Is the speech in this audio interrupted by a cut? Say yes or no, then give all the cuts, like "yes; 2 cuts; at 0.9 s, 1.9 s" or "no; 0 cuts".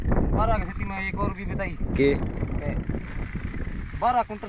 no; 0 cuts